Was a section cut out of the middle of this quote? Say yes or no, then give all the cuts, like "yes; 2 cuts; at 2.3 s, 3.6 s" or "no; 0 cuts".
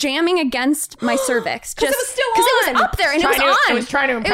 no; 0 cuts